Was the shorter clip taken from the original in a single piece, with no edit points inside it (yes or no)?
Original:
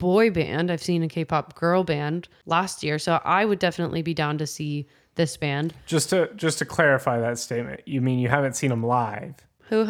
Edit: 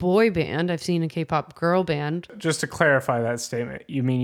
no